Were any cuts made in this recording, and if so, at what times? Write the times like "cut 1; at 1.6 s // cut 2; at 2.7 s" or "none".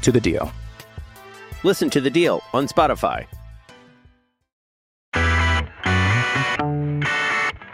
cut 1; at 5.0 s